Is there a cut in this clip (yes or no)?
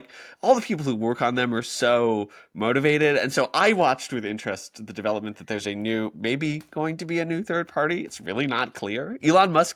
no